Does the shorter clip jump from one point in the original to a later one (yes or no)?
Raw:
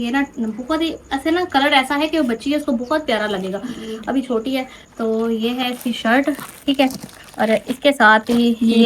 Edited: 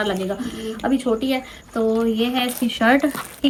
no